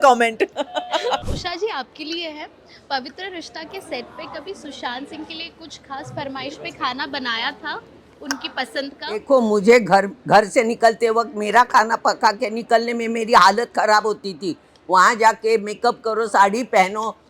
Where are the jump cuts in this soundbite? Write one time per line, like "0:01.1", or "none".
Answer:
0:01.2
0:09.2